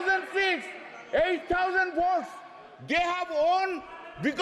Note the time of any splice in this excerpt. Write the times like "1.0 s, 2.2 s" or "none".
none